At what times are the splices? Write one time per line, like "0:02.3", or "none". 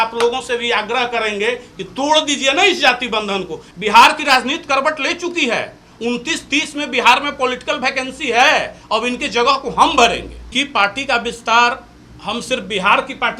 0:03.6
0:10.4

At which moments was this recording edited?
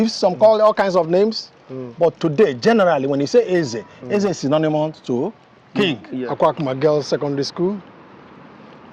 0:06.2

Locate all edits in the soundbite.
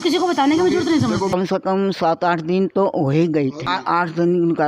0:01.3
0:03.7

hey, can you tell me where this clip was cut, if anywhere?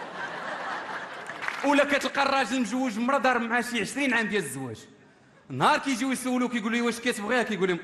0:01.4

